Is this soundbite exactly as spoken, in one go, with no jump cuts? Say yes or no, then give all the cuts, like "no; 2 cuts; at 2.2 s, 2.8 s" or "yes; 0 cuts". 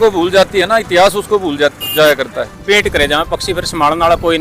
no; 1 cut; at 2.6 s